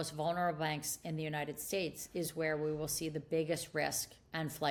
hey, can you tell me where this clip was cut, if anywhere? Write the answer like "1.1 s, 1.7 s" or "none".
none